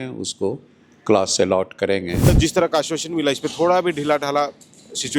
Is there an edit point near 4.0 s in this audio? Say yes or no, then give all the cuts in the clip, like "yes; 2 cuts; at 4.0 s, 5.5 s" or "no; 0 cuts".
no; 1 cut; at 2.3 s